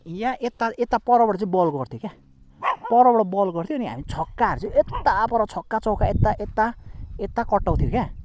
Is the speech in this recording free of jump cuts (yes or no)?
yes